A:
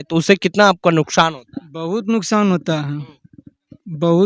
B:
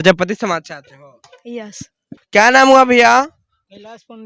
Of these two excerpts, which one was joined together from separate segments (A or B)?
B